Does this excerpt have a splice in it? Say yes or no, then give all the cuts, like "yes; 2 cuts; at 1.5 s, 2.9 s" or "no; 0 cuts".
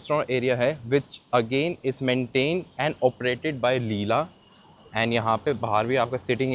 no; 0 cuts